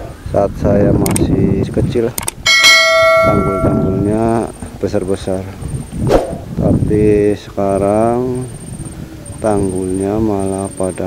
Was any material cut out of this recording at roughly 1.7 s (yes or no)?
yes